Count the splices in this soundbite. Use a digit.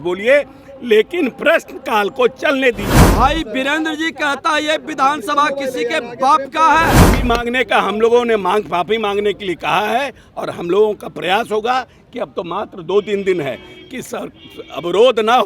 2